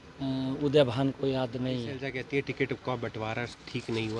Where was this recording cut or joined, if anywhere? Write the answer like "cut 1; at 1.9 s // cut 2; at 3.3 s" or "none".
cut 1; at 2.0 s